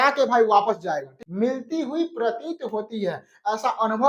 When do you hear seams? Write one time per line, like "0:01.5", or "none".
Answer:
0:01.2